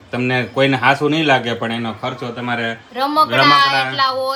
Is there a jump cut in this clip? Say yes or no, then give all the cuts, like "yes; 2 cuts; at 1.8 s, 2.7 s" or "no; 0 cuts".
no; 0 cuts